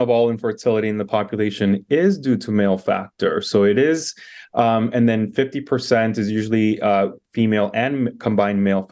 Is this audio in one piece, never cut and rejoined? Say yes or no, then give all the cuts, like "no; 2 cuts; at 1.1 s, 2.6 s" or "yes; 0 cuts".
yes; 0 cuts